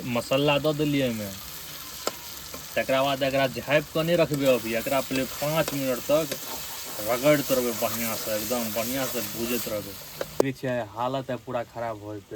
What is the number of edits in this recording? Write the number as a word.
one